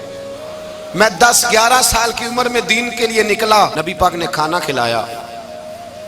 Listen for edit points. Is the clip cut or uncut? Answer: cut